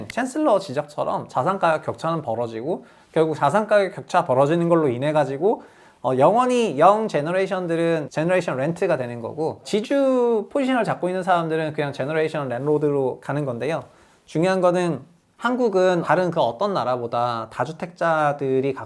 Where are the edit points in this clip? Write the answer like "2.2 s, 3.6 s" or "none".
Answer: 9.6 s

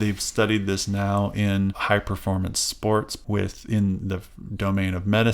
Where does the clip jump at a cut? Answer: 1.8 s, 3.1 s

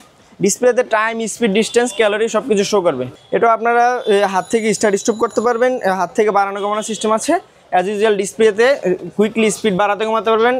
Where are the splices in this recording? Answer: 3.1 s

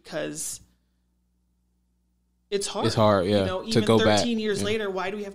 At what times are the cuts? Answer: none

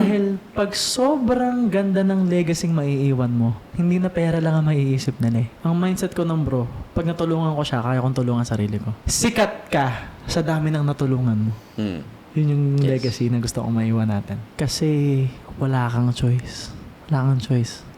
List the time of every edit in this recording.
5.5 s, 8.9 s, 14.4 s

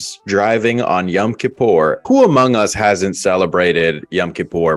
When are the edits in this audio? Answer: 2.0 s

